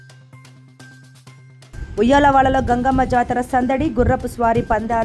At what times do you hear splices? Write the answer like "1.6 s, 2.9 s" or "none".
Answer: 1.7 s

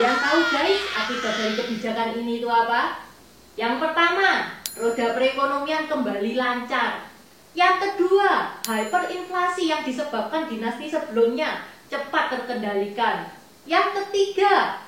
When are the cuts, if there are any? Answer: none

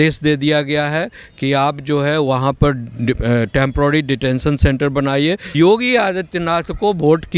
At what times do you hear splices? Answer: 5.4 s

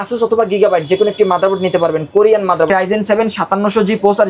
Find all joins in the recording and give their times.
2.7 s

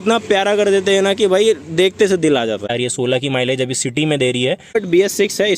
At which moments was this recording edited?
2.7 s, 4.7 s

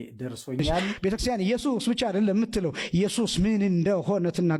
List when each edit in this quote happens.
1.0 s

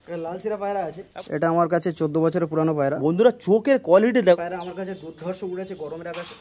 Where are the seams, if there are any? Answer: 1.0 s, 4.4 s

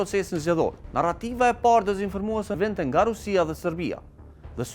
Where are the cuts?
0.8 s, 2.6 s

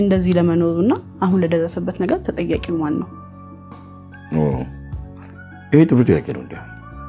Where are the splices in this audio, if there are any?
none

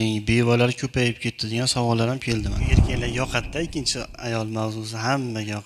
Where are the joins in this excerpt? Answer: 2.8 s

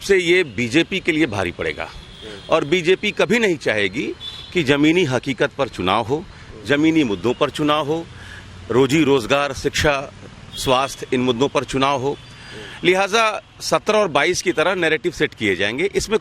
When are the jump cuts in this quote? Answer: none

